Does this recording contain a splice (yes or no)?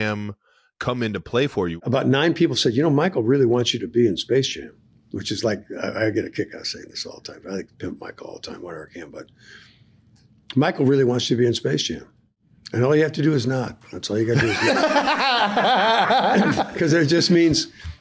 yes